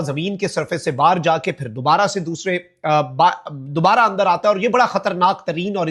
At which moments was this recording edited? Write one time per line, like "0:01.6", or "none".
none